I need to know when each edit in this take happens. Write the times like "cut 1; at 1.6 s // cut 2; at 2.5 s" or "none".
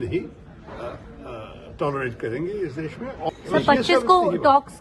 cut 1; at 3.3 s